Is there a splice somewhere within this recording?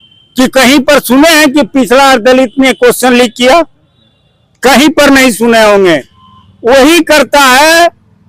no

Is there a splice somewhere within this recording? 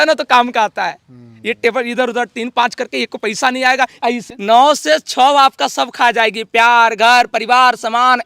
yes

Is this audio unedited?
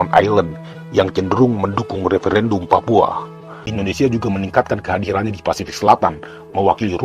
no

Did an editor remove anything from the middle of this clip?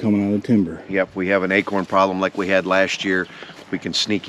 no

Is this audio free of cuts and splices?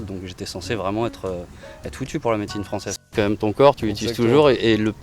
no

